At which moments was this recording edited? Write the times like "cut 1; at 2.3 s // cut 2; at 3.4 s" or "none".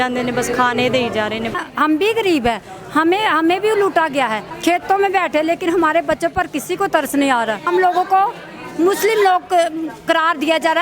cut 1; at 1.5 s // cut 2; at 4.5 s // cut 3; at 7.7 s